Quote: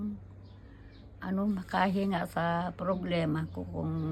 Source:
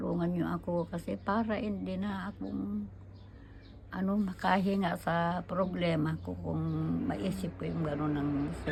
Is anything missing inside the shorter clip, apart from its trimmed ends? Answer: no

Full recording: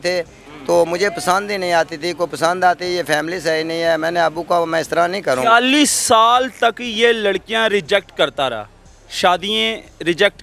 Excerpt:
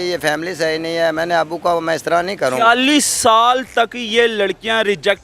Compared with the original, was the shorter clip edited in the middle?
no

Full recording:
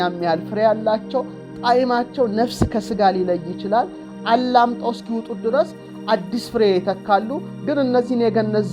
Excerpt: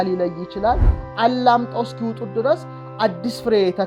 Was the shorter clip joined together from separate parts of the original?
no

